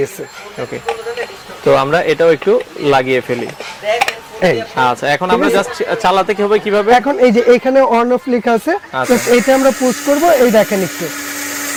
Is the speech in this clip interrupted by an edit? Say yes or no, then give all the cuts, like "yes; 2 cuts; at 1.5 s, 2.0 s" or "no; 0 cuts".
no; 0 cuts